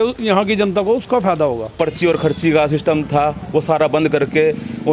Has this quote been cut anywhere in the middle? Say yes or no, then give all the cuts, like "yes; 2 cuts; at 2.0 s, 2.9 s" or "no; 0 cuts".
yes; 1 cut; at 1.8 s